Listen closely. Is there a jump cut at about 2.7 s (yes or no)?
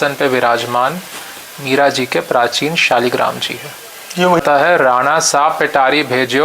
no